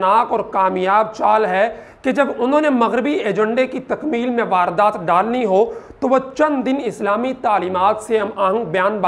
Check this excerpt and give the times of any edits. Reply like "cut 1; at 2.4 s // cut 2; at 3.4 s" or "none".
none